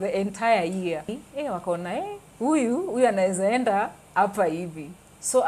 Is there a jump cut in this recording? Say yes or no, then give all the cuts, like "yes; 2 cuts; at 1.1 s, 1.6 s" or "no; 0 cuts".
yes; 1 cut; at 1.1 s